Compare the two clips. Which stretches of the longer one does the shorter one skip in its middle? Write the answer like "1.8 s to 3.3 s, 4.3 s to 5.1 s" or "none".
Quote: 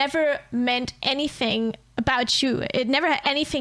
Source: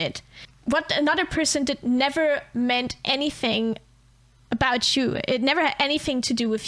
3.9 s to 4.4 s